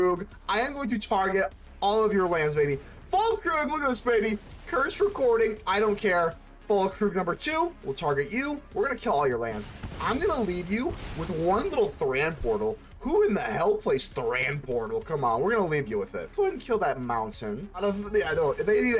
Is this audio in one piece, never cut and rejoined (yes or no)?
no